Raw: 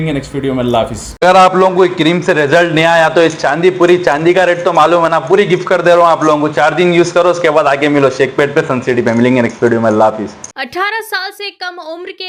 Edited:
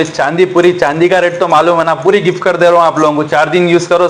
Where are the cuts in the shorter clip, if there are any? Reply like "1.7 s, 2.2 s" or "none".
none